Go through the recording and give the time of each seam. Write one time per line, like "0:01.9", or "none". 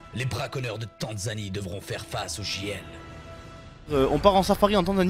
0:03.8